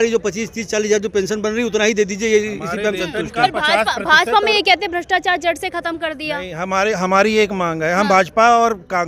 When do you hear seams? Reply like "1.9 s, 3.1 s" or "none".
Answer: none